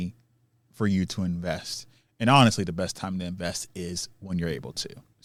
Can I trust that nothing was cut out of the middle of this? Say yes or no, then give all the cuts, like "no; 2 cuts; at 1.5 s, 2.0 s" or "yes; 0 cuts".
yes; 0 cuts